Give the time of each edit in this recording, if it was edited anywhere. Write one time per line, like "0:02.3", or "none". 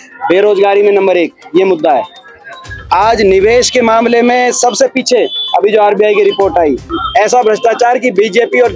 0:06.9

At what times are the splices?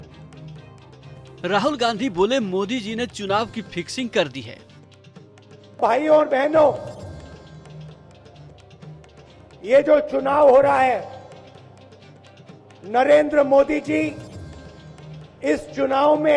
0:01.4
0:11.4
0:12.8

